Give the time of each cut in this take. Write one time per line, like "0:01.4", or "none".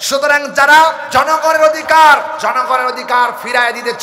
0:01.0
0:02.3